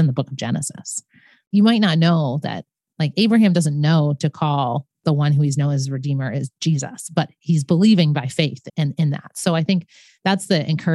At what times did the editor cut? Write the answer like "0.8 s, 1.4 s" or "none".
1.3 s, 8.6 s

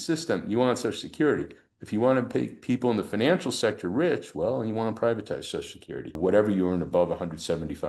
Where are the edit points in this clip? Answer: 6.2 s

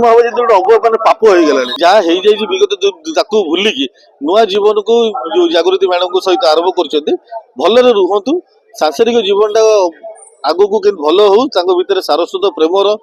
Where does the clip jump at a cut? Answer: 1.7 s

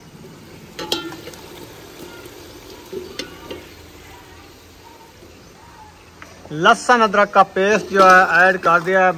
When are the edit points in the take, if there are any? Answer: none

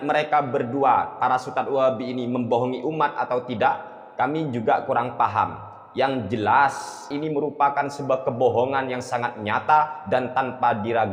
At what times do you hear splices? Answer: 7.1 s

